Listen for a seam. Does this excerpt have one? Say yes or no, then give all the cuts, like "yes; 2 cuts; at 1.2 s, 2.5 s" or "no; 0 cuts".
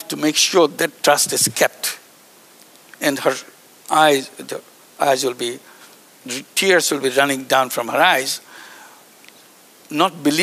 no; 0 cuts